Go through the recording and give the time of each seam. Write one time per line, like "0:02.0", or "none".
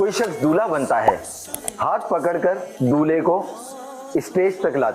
0:01.6